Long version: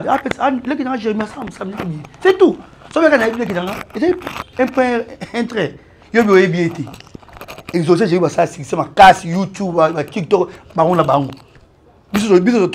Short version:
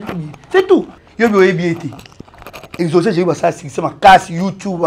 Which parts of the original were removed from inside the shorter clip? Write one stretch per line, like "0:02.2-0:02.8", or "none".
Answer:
0:02.7-0:06.0